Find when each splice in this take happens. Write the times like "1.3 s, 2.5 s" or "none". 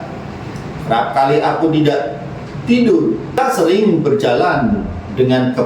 3.4 s